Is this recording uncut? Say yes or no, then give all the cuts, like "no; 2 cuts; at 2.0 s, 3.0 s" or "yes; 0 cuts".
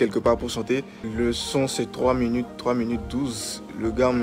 no; 1 cut; at 1.1 s